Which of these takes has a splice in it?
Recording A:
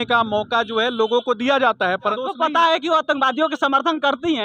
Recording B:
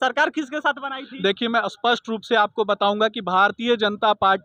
A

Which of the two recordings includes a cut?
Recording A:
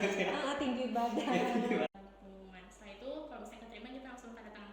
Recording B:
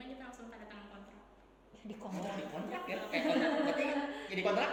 A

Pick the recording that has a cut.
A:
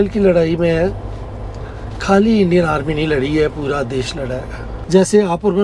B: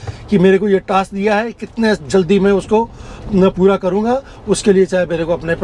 A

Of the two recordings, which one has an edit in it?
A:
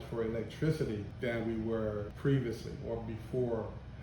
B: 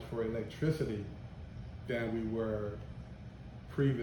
A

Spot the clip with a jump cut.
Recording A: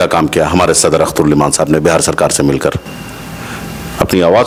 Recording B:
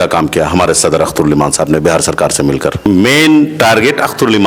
B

